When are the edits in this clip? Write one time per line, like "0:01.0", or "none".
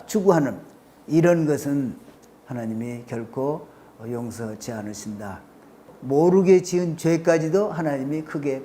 0:05.9